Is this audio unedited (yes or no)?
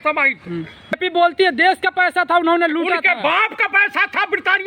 no